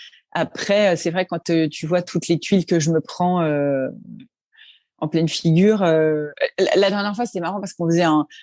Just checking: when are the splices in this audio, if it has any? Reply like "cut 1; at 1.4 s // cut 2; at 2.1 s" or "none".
none